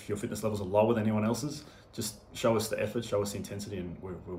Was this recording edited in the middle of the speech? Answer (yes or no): no